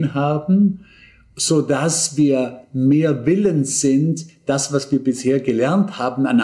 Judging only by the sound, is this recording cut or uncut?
uncut